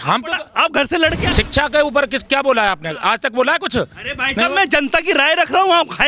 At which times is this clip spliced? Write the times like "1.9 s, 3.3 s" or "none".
1.2 s